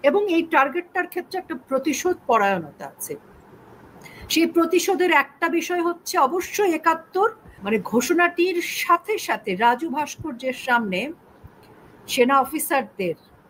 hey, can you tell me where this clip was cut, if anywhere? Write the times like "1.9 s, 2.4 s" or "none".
7.5 s